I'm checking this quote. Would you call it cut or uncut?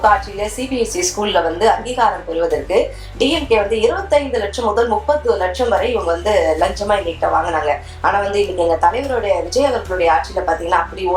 uncut